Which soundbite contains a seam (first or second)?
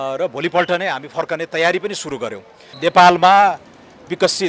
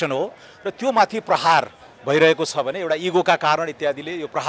first